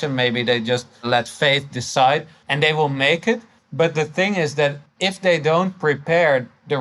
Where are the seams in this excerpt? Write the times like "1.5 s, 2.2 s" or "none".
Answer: 1.1 s, 2.4 s, 3.6 s, 4.9 s